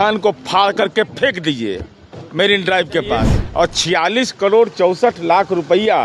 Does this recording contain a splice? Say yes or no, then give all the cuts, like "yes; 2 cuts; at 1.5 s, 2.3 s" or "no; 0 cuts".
yes; 1 cut; at 3.4 s